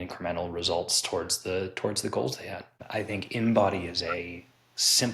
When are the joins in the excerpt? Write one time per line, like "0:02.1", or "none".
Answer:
0:02.8